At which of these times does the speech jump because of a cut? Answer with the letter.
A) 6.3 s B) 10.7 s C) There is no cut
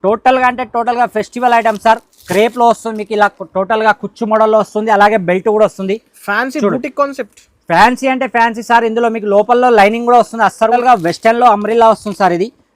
B